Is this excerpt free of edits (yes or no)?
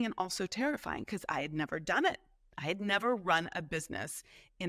yes